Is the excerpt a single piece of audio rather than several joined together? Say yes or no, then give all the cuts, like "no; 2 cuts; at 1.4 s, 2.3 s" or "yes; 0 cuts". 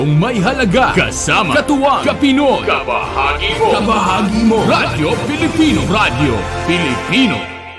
no; 2 cuts; at 0.9 s, 5.8 s